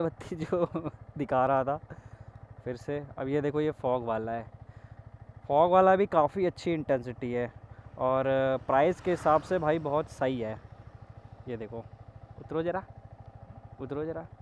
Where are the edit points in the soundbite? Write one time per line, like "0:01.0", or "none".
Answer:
none